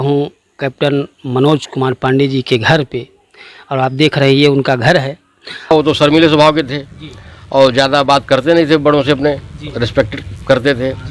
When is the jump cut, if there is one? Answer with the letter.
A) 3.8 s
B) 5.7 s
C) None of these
B